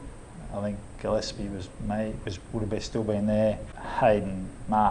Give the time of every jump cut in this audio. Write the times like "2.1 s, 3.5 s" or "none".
3.8 s